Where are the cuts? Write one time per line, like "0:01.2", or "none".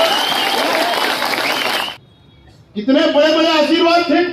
0:01.9